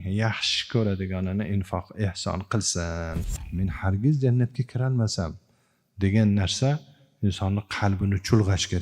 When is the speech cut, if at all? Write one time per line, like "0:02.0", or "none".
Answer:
0:03.4

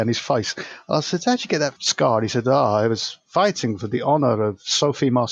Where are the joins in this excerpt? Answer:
0:01.8

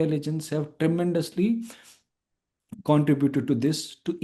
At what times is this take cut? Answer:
none

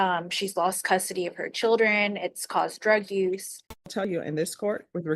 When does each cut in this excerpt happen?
0:04.0

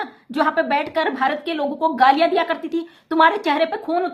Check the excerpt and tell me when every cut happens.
none

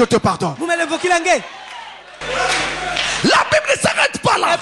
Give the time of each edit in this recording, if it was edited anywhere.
0:02.2

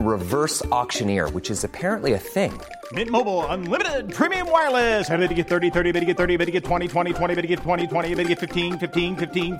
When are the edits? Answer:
none

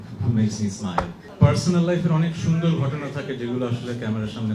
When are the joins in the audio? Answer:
0:01.2

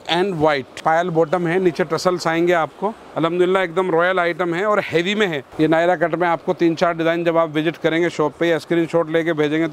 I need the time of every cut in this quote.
0:00.8
0:03.0
0:05.4

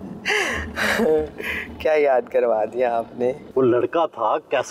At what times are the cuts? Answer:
0:03.4

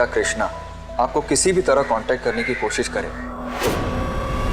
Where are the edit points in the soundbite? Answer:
0:03.2

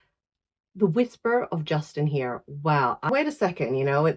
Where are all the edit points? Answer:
0:03.1

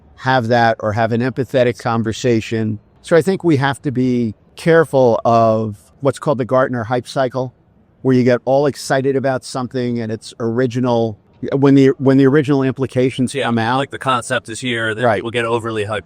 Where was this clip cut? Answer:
0:02.9
0:04.5
0:05.8
0:11.3

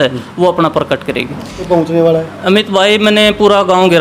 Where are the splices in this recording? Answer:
0:01.6

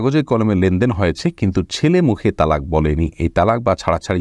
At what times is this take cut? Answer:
none

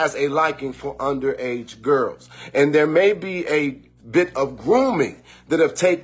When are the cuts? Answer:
0:02.6

